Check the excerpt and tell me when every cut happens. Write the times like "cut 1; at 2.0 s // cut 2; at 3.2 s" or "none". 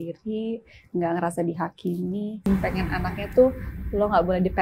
cut 1; at 2.5 s

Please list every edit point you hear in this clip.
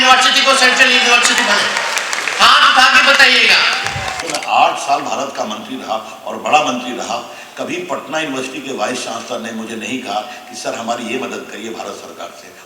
cut 1; at 4.2 s

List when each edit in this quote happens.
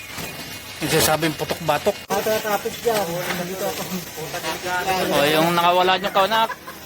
cut 1; at 2.0 s

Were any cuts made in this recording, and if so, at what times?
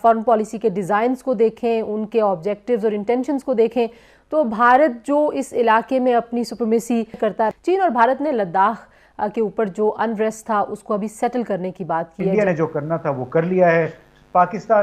cut 1; at 7.3 s // cut 2; at 12.3 s

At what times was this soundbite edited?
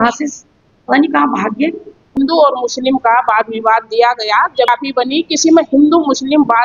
cut 1; at 2.1 s

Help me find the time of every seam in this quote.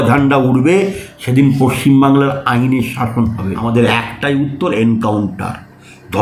cut 1; at 3.6 s

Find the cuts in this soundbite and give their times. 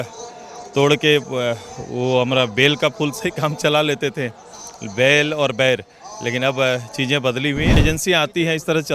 cut 1; at 7.8 s

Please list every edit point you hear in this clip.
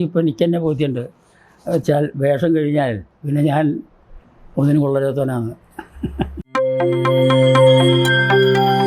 cut 1; at 6.4 s

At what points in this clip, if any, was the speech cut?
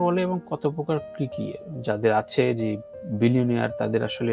none

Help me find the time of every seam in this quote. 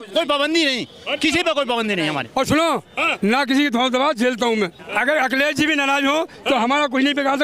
cut 1; at 2.3 s // cut 2; at 4.8 s

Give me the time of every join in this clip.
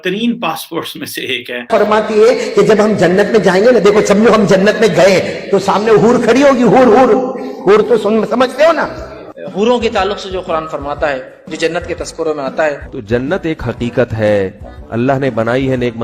cut 1; at 1.7 s

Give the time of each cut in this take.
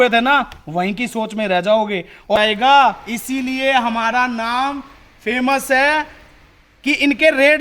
cut 1; at 2.3 s

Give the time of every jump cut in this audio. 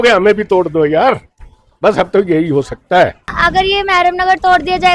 cut 1; at 3.3 s

